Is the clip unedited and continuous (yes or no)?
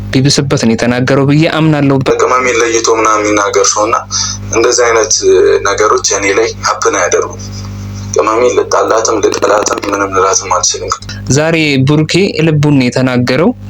no